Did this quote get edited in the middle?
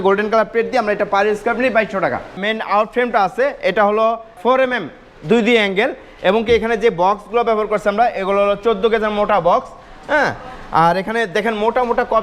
yes; 2 cuts; at 2.4 s, 4.3 s

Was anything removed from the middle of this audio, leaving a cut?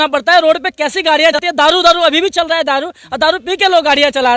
yes; 1 cut; at 1.4 s

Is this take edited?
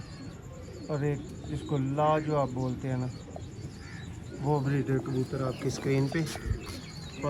no; 0 cuts

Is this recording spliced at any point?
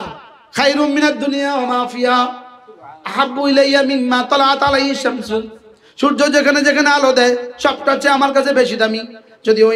no; 0 cuts

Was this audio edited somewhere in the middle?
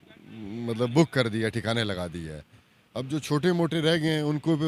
no; 0 cuts

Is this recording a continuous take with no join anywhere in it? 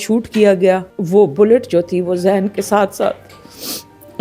no; 1 cut; at 0.9 s

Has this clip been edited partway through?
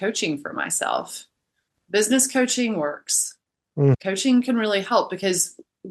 yes; 1 cut; at 4.0 s

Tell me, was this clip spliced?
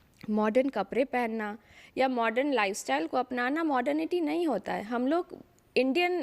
no; 0 cuts

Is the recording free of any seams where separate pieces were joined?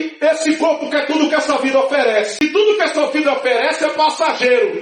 no; 1 cut; at 2.4 s

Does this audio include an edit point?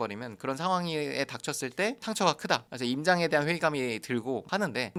no; 0 cuts

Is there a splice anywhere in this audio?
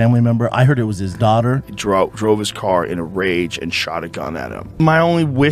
yes; 2 cuts; at 1.7 s, 4.7 s

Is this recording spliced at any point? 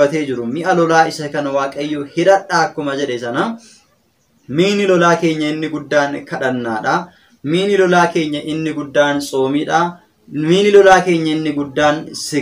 no; 0 cuts

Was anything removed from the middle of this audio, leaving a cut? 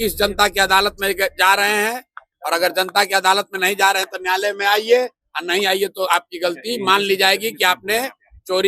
no; 0 cuts

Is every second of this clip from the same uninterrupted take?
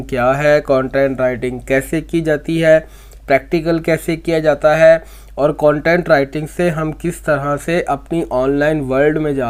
yes; 0 cuts

